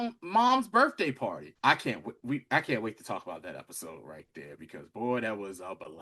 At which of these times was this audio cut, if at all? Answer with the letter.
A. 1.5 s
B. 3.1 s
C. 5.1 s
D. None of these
A